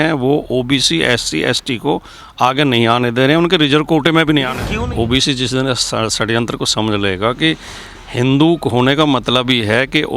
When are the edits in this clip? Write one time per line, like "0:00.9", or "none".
0:04.6